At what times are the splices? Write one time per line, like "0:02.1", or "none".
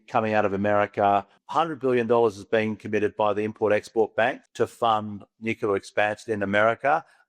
0:01.4
0:04.4